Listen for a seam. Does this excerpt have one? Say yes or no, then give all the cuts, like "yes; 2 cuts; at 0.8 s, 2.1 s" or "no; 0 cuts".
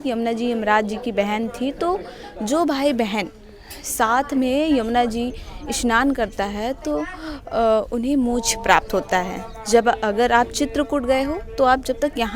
no; 0 cuts